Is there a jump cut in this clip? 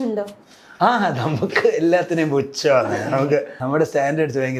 yes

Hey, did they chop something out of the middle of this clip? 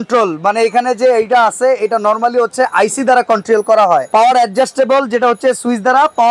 no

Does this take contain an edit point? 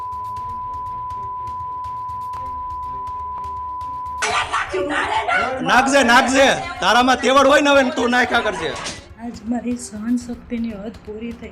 no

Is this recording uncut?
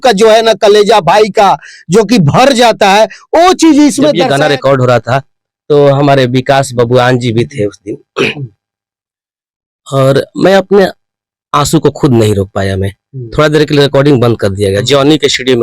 no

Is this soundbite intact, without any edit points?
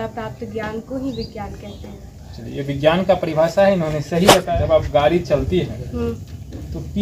no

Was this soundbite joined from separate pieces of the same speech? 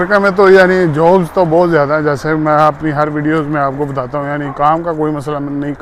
no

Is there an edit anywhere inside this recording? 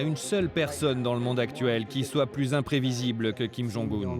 no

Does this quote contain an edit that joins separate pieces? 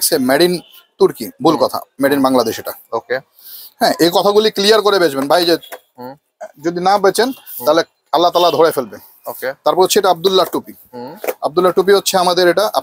no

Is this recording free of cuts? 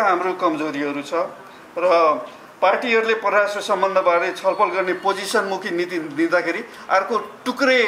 yes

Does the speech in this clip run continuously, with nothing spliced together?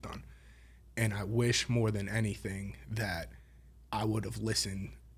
yes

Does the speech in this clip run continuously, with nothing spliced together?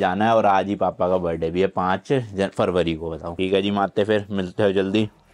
yes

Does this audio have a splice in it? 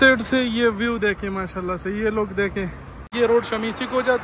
yes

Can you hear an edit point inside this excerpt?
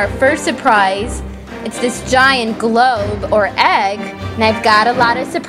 no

